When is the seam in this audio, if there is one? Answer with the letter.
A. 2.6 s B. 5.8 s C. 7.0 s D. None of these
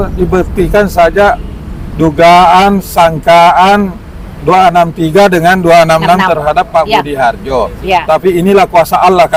D